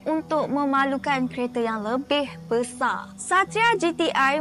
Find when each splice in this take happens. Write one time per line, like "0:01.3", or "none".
none